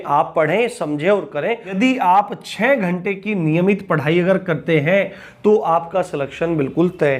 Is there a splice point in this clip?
yes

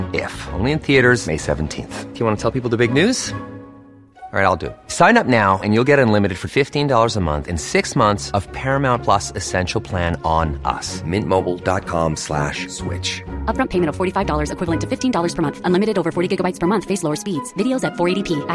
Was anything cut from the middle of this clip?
no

